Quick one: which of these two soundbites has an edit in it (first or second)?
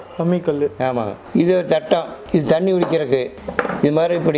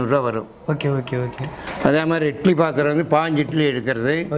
first